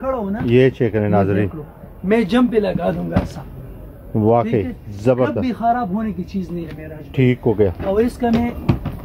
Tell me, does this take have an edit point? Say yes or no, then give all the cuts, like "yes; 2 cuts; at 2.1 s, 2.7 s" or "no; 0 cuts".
no; 0 cuts